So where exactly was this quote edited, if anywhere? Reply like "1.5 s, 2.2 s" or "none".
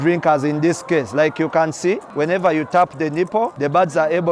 2.1 s, 3.5 s